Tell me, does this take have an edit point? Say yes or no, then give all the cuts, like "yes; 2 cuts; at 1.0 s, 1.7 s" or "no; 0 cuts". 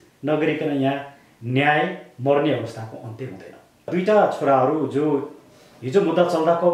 yes; 1 cut; at 3.9 s